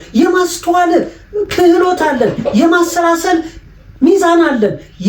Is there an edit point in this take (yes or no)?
no